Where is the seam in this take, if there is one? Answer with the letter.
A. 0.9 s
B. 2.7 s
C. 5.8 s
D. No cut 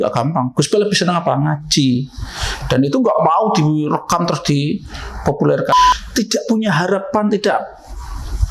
C